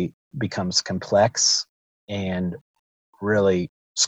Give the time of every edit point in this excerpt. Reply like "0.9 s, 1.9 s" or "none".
3.0 s